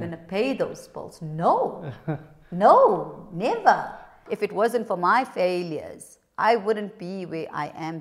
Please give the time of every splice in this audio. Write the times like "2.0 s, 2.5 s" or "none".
4.3 s